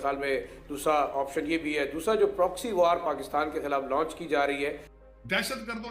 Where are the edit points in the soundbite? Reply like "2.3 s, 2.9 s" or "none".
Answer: 5.0 s